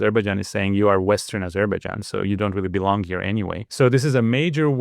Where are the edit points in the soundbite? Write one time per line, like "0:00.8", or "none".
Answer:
0:03.6

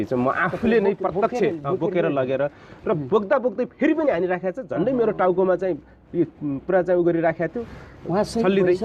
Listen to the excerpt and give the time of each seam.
none

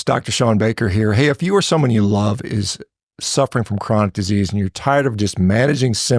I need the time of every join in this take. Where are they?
none

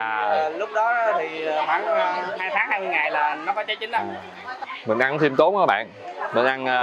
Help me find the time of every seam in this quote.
0:04.6

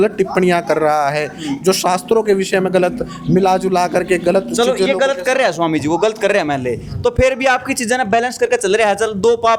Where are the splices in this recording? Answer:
none

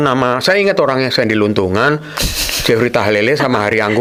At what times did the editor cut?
none

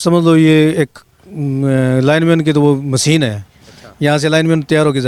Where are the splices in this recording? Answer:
none

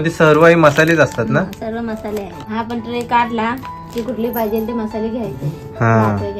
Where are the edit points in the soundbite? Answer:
0:02.5

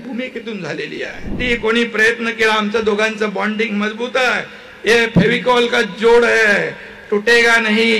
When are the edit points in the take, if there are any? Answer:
0:01.4

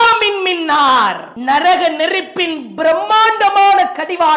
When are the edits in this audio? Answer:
0:01.3

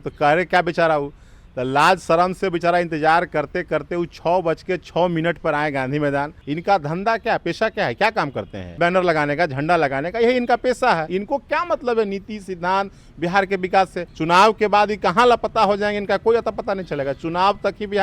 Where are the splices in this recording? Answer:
0:06.4
0:08.8
0:11.1
0:14.1

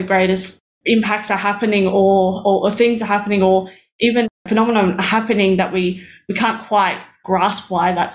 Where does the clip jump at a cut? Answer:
0:04.3

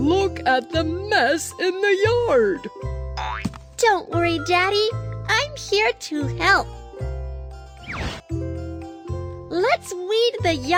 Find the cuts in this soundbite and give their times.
none

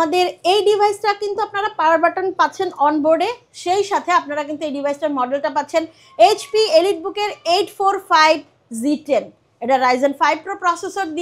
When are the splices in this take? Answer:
none

